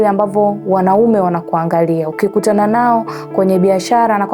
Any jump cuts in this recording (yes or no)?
no